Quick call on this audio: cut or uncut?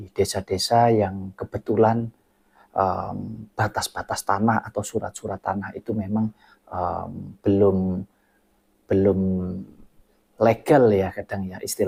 uncut